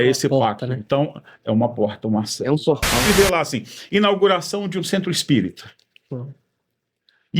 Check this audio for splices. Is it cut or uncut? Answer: cut